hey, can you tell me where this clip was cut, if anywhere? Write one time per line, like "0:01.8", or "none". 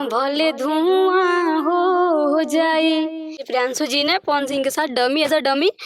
0:03.4